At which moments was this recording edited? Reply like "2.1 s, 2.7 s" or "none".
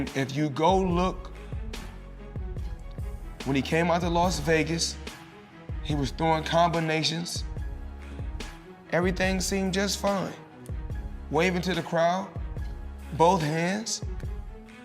1.5 s, 3.0 s